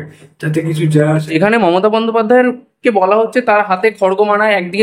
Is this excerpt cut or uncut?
cut